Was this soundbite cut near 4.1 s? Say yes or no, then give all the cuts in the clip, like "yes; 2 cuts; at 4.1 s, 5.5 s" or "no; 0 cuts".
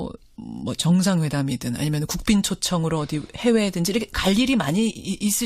yes; 1 cut; at 4.1 s